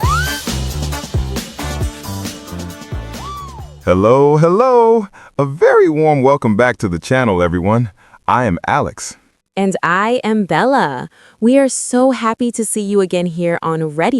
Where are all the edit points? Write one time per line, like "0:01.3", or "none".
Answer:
0:03.7